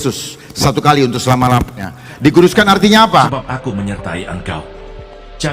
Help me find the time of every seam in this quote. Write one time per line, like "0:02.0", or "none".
0:03.4